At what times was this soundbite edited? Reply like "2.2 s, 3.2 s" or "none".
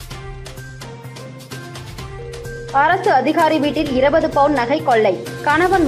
0.9 s